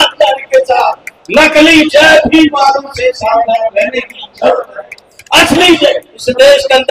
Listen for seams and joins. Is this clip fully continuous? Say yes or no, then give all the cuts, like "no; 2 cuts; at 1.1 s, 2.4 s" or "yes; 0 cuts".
yes; 0 cuts